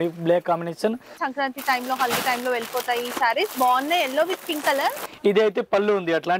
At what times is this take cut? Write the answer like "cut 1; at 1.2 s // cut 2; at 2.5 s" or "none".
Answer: cut 1; at 1.2 s // cut 2; at 5.1 s